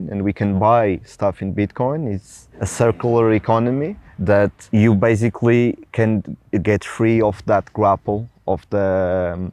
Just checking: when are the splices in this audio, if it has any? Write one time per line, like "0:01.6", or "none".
none